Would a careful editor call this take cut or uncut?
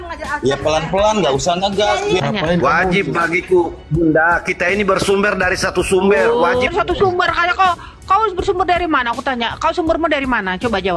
cut